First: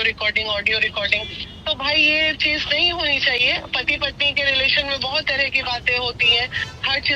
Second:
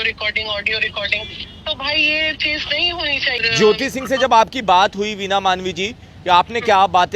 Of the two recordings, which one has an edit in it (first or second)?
second